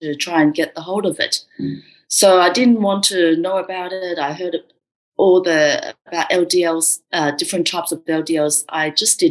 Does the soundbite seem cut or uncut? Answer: uncut